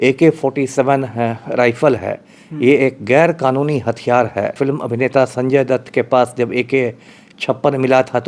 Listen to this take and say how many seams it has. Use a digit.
1